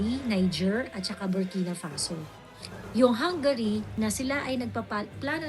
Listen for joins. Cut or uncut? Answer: cut